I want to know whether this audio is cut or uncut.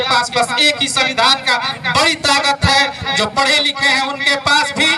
uncut